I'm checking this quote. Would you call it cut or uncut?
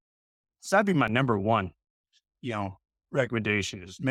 uncut